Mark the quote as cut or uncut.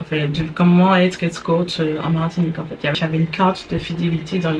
cut